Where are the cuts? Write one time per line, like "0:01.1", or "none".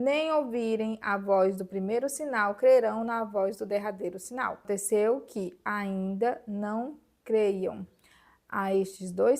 0:04.6